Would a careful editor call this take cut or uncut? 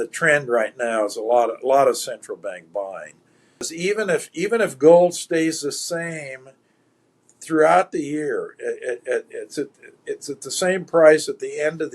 cut